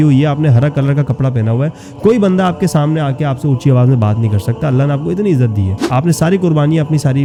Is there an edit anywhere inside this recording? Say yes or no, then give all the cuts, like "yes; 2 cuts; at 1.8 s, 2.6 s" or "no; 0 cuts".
no; 0 cuts